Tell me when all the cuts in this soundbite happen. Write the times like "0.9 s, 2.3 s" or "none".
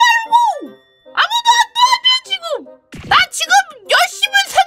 2.9 s